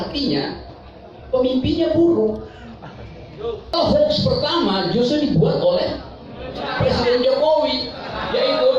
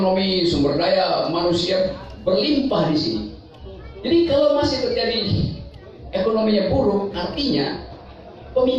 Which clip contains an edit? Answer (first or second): first